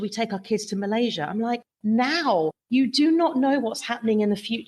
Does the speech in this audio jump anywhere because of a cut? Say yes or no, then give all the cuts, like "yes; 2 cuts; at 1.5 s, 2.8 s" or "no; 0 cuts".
no; 0 cuts